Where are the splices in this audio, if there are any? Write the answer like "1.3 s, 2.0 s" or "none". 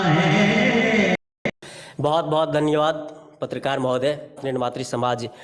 1.2 s, 4.7 s